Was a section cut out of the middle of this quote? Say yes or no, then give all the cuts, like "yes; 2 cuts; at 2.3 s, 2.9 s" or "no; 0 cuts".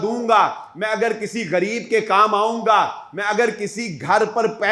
no; 0 cuts